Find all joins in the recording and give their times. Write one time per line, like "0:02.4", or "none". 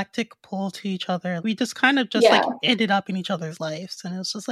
0:01.4